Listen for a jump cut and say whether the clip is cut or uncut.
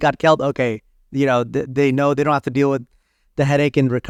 uncut